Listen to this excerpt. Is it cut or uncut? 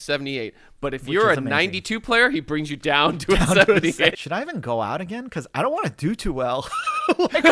cut